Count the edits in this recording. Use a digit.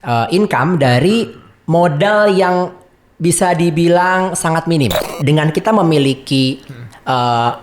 1